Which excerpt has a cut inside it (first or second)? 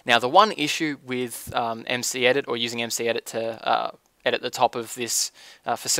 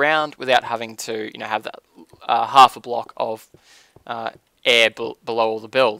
first